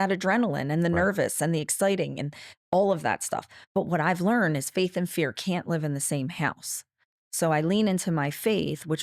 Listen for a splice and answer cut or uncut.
uncut